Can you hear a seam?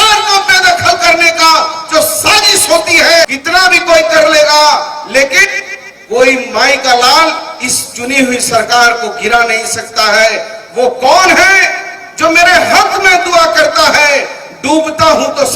yes; 1 cut; at 3.2 s

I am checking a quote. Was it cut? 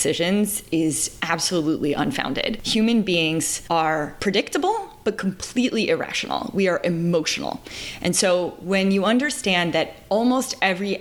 yes; 2 cuts; at 2.6 s, 3.8 s

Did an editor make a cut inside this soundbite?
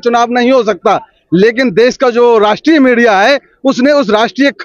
no; 0 cuts

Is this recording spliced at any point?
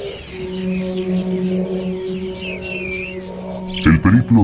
yes; 1 cut; at 2.1 s

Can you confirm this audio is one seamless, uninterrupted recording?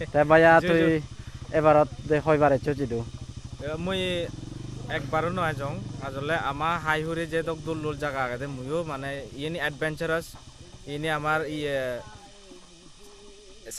yes; 0 cuts

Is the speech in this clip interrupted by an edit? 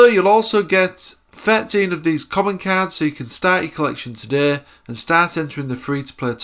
no; 0 cuts

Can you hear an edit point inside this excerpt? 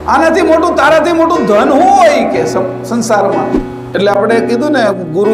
yes; 1 cut; at 3.7 s

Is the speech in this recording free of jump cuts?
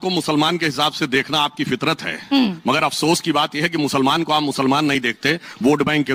yes; 0 cuts

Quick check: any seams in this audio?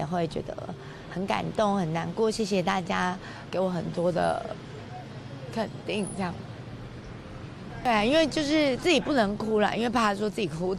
yes; 1 cut; at 7.8 s

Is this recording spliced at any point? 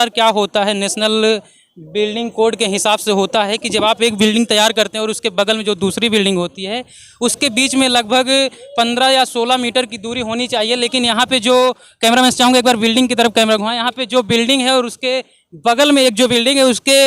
no; 0 cuts

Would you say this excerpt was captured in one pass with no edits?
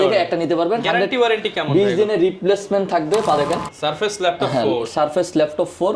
no; 1 cut; at 3.4 s

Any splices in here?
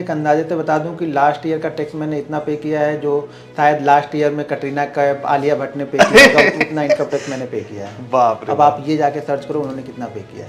no; 0 cuts

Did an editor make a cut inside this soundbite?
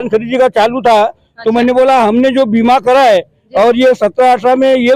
no; 0 cuts

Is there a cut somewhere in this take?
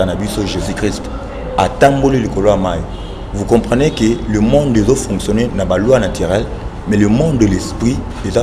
no; 0 cuts

